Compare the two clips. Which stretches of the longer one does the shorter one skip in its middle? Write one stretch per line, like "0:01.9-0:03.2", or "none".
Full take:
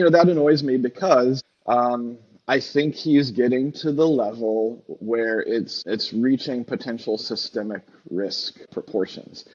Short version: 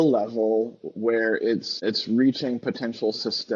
none